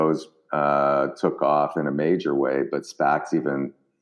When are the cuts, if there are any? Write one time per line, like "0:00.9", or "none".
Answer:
none